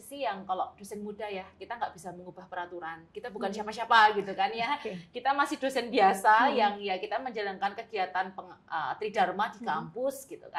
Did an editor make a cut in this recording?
no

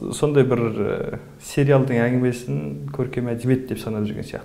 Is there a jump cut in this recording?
no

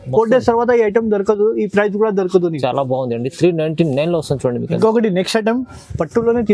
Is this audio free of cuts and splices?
yes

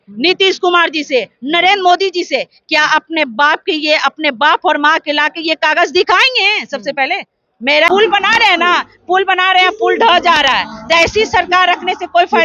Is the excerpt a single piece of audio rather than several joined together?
no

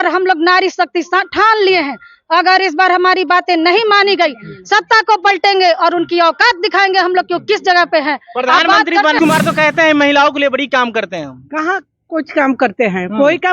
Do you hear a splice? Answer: yes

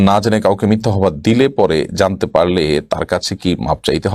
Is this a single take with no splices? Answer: yes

